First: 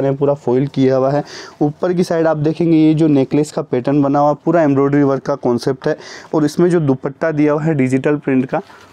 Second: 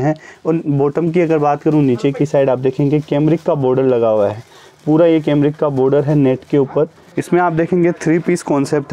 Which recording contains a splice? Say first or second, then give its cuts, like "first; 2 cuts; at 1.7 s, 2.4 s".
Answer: second; 1 cut; at 7.1 s